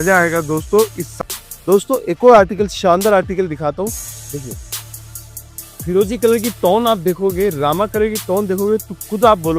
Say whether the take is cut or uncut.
cut